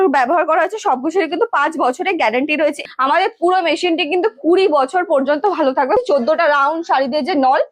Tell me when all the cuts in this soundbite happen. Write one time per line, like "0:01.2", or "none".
0:02.8
0:06.0